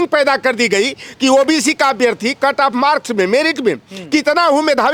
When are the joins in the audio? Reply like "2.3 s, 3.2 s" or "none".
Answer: none